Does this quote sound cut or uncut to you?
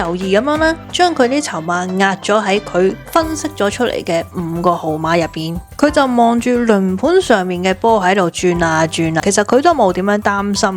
cut